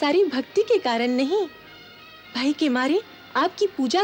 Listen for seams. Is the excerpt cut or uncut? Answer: uncut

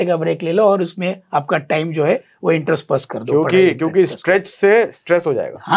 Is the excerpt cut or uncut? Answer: uncut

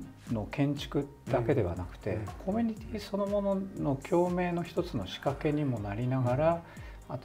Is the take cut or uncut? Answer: uncut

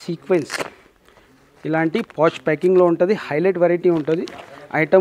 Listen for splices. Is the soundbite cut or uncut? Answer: uncut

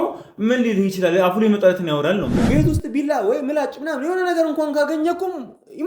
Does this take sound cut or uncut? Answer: cut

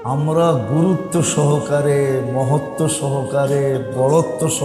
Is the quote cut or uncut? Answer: uncut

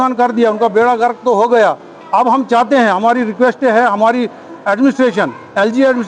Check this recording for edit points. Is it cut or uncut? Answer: uncut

